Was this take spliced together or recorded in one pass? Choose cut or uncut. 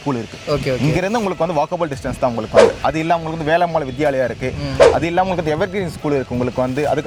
uncut